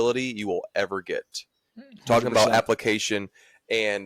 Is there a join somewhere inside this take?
no; 0 cuts

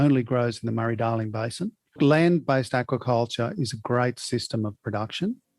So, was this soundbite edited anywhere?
yes; 1 cut; at 2.0 s

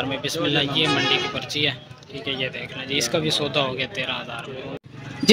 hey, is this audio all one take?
yes; 0 cuts

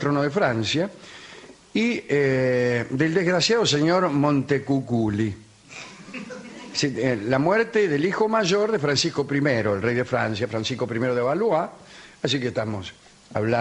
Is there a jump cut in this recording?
yes; 1 cut; at 11.8 s

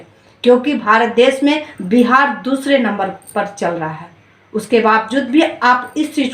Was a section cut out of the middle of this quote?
yes; 1 cut; at 4.2 s

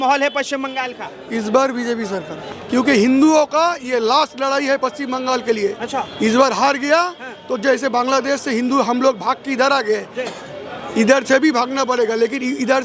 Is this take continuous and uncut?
no; 1 cut; at 2.4 s

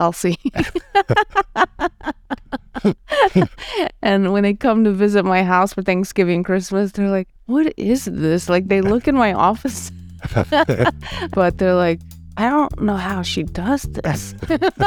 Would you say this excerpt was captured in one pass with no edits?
yes; 0 cuts

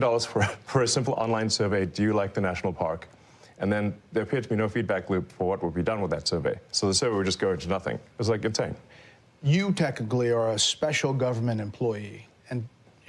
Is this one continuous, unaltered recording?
yes; 0 cuts

